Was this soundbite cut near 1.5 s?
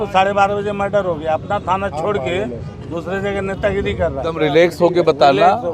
no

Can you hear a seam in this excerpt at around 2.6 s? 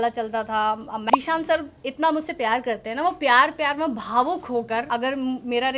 no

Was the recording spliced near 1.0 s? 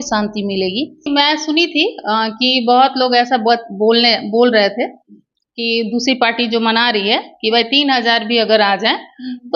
yes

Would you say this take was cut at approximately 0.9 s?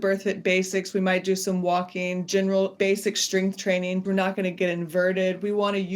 no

